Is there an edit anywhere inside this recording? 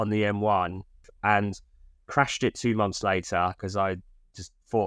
yes; 1 cut; at 1.1 s

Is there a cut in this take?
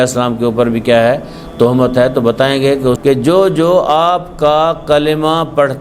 yes; 1 cut; at 3.0 s

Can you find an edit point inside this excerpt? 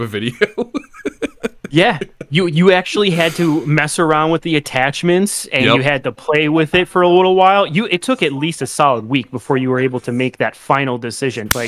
no; 0 cuts

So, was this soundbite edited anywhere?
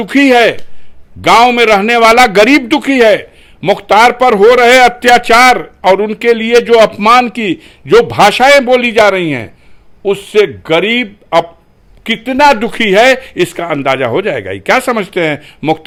no; 0 cuts

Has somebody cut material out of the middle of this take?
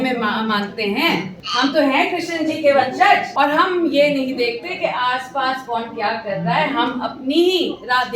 yes; 2 cuts; at 1.4 s, 3.3 s

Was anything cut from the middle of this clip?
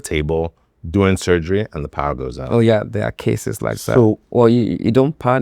yes; 1 cut; at 4.2 s

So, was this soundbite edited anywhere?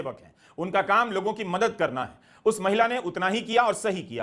no; 0 cuts

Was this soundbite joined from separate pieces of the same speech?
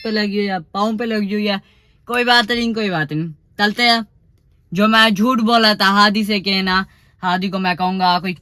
no; 0 cuts

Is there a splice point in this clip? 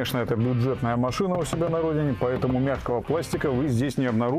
no; 0 cuts

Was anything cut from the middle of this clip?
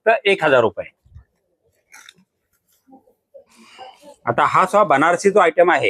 yes; 1 cut; at 4.1 s

